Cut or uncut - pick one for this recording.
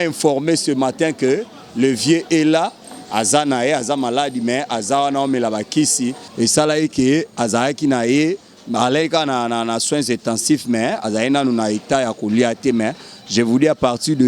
cut